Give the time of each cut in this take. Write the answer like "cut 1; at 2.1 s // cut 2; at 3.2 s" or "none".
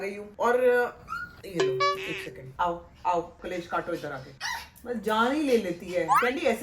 none